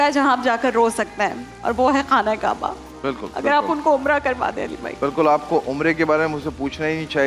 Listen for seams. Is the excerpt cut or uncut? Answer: uncut